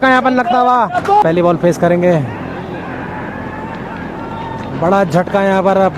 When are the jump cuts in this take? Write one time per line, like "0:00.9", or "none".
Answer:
0:01.2